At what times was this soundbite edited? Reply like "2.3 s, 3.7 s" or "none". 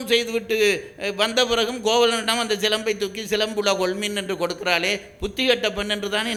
none